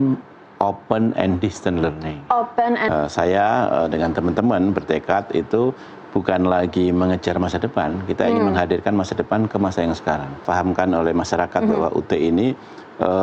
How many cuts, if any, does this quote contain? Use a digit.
2